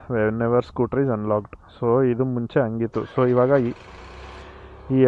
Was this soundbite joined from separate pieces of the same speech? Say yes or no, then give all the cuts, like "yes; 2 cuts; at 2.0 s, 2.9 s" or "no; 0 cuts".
no; 0 cuts